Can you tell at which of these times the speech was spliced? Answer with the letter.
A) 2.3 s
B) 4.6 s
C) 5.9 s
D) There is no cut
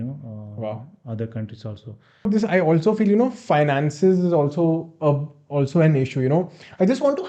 A